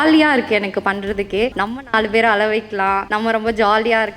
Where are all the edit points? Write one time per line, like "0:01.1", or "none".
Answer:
0:01.6
0:03.1